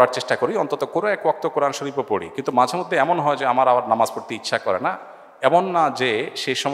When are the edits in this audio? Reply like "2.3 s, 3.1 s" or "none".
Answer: none